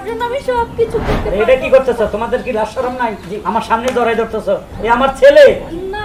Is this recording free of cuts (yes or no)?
yes